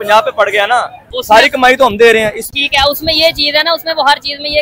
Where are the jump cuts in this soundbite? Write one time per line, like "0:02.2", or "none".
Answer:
0:01.1
0:02.4